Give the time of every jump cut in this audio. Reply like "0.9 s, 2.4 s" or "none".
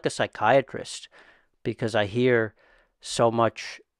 none